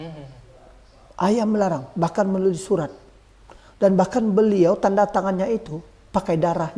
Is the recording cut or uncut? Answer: uncut